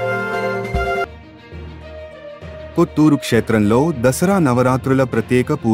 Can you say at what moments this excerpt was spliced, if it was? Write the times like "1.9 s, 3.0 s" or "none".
1.1 s